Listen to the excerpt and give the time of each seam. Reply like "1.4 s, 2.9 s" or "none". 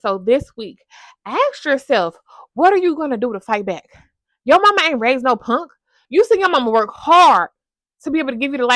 6.0 s